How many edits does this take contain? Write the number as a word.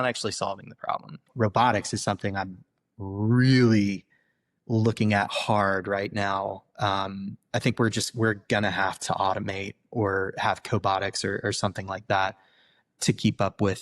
one